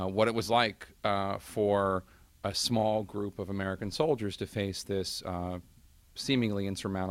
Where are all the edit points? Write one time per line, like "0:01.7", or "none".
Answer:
0:02.2